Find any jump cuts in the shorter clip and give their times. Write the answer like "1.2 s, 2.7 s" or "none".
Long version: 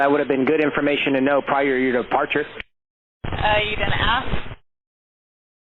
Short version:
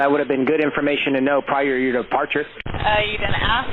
2.6 s